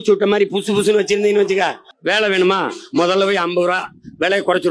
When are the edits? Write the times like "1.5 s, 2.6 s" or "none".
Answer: 1.9 s